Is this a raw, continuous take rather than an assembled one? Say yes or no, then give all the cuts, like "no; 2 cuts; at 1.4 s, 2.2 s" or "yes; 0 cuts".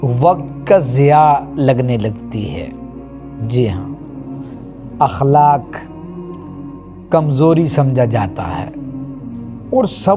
yes; 0 cuts